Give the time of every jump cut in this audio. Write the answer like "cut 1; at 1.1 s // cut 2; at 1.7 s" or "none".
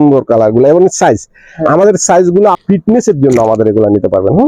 cut 1; at 2.6 s